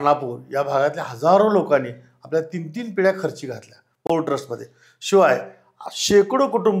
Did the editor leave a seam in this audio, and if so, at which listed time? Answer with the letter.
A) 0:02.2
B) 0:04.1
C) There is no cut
C